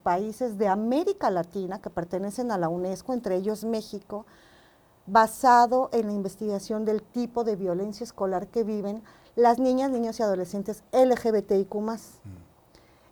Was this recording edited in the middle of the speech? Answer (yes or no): no